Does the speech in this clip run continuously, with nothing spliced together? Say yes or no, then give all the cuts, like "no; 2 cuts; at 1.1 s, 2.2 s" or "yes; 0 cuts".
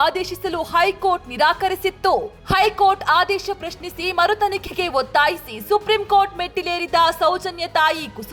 yes; 0 cuts